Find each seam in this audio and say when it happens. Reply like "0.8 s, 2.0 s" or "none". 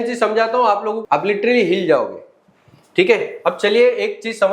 1.0 s